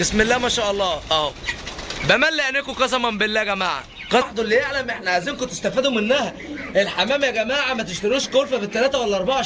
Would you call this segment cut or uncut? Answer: cut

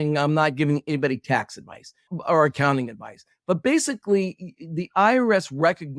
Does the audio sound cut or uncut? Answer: uncut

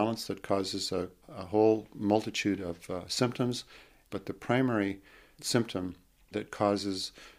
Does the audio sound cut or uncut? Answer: cut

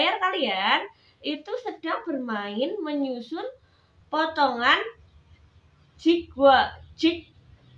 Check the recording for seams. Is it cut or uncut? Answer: uncut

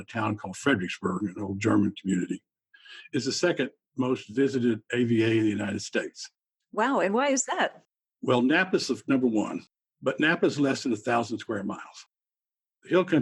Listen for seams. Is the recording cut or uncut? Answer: cut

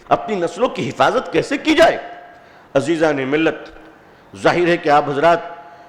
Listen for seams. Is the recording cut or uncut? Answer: uncut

